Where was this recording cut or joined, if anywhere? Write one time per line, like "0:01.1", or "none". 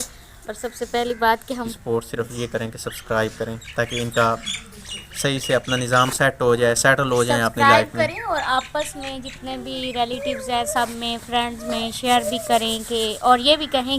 0:01.7